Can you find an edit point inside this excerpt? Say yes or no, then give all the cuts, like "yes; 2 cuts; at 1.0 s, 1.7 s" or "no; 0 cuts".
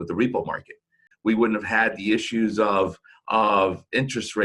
yes; 1 cut; at 1.1 s